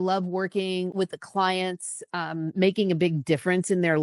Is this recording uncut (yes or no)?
no